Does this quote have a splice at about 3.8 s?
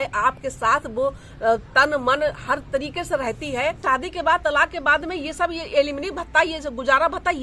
yes; 1 cut; at 3.8 s

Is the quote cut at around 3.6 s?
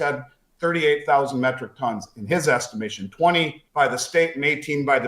yes; 1 cut; at 3.6 s

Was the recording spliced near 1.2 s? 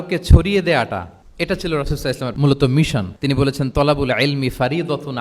yes; 3 cuts; at 1.2 s, 2.3 s, 3.1 s

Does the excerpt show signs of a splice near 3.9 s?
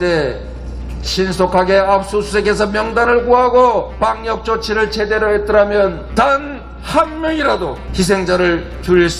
yes; 3 cuts; at 3.9 s, 6.0 s, 7.8 s

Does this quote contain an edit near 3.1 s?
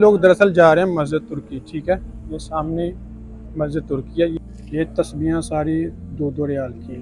no; 1 cut; at 4.4 s

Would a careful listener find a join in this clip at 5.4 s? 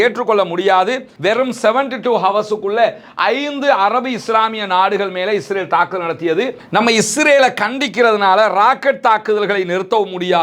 no; 2 cuts; at 1.1 s, 6.6 s

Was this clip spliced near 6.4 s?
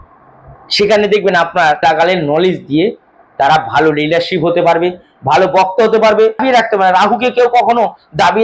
yes; 2 cuts; at 1.8 s, 6.4 s

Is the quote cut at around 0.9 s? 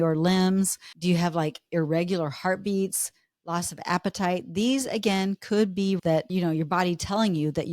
yes; 2 cuts; at 0.9 s, 6.0 s

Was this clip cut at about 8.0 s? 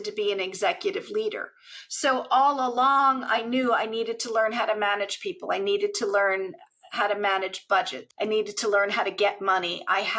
yes; 1 cut; at 8.0 s

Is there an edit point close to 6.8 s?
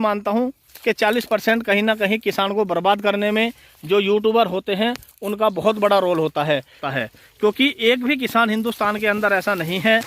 yes; 1 cut; at 6.8 s

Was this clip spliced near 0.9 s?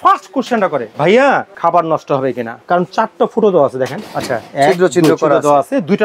yes; 3 cuts; at 0.9 s, 1.5 s, 2.5 s

